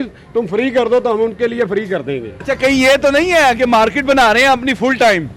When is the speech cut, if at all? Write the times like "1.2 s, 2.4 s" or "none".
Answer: 2.3 s

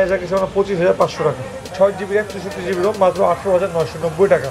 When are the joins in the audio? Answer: 1.6 s

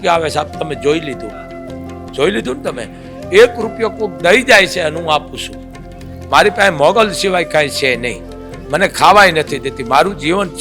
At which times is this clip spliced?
none

